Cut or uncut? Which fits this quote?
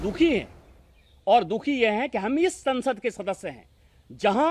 uncut